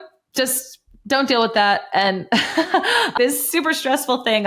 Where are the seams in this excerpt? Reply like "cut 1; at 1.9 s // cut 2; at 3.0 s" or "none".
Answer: cut 1; at 3.1 s